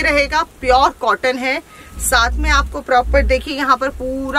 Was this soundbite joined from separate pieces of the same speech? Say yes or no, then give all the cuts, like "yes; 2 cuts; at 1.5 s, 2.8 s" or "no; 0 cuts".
no; 0 cuts